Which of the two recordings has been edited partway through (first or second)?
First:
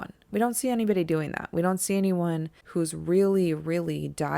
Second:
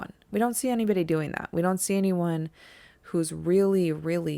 first